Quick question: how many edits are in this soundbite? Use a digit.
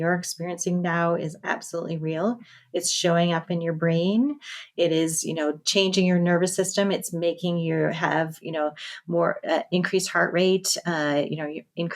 0